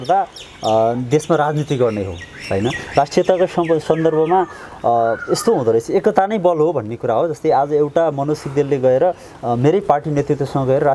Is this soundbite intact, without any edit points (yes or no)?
yes